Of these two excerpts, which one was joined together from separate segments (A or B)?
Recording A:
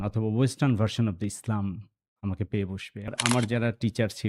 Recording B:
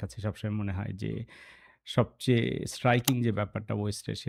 A